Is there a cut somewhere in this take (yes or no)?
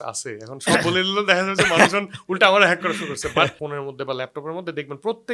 yes